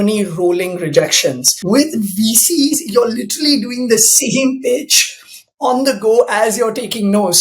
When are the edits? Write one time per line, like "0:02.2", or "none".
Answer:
0:01.5